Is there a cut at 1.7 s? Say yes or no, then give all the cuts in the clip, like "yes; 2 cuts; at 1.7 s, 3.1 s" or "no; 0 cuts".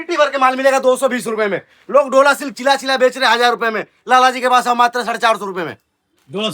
no; 0 cuts